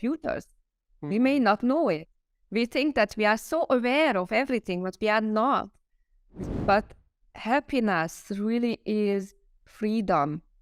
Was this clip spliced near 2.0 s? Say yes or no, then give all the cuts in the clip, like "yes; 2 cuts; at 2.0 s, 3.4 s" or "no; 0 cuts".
no; 1 cut; at 6.4 s